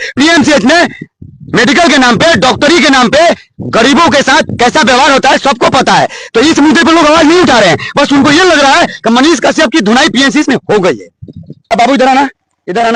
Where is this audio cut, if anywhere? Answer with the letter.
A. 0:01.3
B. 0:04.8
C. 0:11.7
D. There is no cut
C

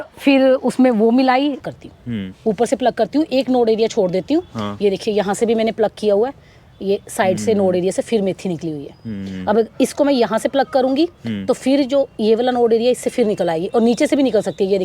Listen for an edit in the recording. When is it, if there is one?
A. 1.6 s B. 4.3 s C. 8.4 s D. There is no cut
A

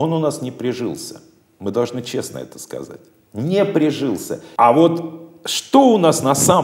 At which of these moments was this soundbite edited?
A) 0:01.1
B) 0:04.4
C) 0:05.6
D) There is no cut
B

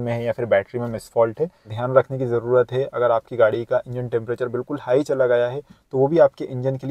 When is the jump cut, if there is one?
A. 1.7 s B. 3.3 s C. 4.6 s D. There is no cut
A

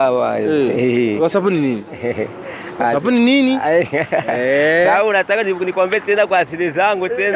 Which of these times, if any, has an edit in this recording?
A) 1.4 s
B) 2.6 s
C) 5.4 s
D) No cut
D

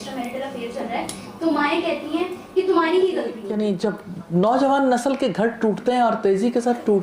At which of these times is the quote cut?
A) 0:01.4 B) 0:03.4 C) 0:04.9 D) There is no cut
B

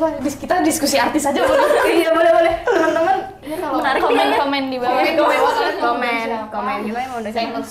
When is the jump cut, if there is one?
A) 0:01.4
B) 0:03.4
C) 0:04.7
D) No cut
D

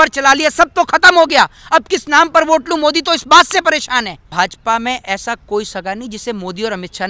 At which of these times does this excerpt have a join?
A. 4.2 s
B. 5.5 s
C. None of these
A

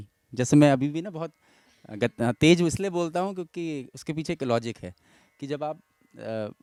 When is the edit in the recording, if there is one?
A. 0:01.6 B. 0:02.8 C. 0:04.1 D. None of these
D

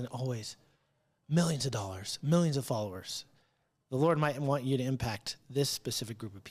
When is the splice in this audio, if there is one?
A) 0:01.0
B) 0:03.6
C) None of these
C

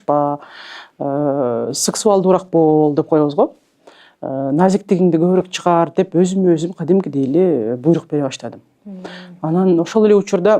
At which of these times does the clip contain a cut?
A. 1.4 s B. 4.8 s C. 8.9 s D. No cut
D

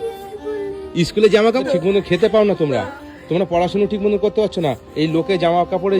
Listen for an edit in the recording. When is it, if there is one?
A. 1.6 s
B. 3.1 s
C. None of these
A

